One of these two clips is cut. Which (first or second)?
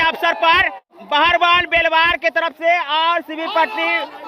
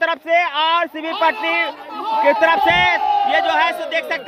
first